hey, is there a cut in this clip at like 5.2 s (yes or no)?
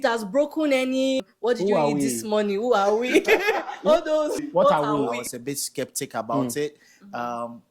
yes